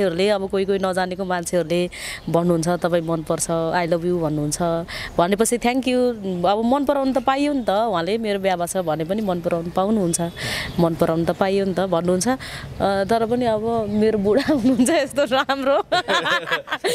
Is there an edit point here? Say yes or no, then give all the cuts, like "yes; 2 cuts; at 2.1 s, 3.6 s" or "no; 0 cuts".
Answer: no; 0 cuts